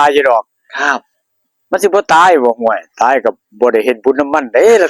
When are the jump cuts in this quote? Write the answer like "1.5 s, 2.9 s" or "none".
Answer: none